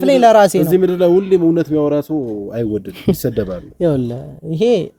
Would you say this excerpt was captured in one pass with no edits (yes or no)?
yes